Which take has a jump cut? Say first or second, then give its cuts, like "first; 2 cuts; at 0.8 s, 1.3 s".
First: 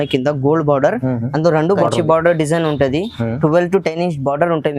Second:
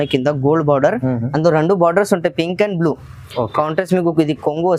first; 1 cut; at 1.8 s